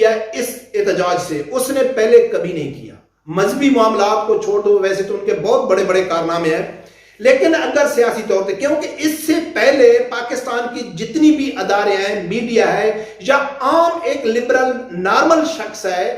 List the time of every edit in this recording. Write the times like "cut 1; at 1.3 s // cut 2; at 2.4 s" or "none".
none